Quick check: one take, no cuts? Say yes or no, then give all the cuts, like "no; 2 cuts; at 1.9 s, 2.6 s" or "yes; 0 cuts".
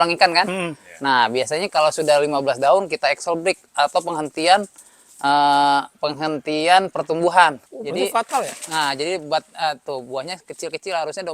no; 1 cut; at 7.7 s